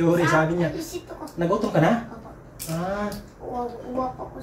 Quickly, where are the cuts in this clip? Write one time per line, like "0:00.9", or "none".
none